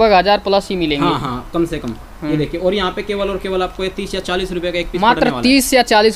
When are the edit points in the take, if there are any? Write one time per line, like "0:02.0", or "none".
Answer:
none